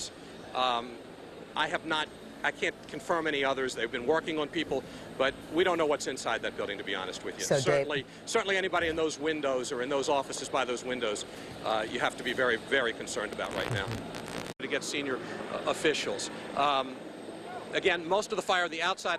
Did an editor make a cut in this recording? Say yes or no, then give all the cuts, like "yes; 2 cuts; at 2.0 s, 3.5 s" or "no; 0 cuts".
no; 0 cuts